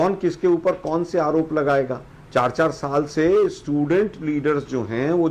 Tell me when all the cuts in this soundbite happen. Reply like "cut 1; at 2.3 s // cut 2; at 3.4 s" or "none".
none